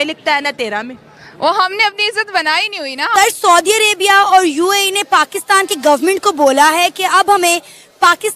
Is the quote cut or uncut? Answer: cut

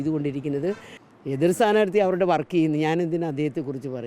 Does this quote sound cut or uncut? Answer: cut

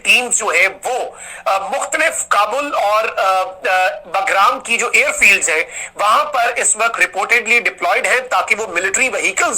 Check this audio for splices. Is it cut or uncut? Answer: uncut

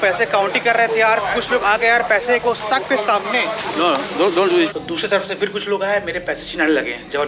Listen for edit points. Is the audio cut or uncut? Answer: cut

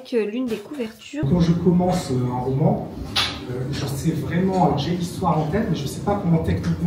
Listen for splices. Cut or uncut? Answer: cut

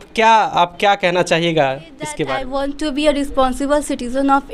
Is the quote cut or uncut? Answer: cut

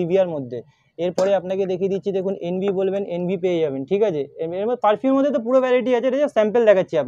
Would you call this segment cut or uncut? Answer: uncut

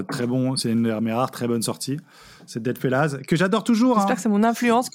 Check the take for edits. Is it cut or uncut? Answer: uncut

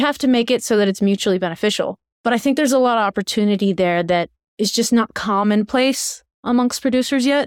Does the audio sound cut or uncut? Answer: cut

